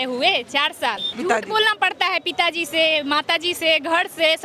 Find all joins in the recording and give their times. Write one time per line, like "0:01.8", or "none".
0:01.1